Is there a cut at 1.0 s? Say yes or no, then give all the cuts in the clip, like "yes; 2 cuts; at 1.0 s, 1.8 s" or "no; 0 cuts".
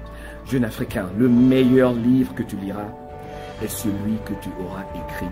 no; 0 cuts